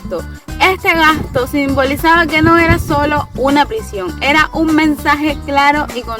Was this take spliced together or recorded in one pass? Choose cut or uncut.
uncut